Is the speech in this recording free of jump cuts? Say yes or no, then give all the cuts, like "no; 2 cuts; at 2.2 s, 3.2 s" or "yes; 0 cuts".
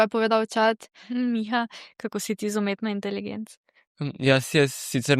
no; 1 cut; at 1.0 s